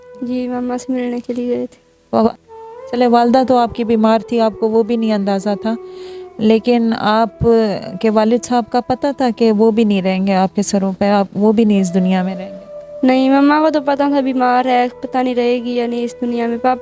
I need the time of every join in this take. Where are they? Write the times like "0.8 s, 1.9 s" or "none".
2.3 s